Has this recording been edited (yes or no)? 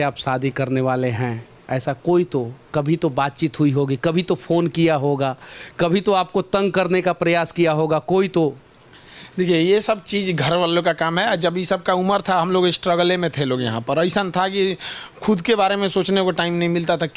no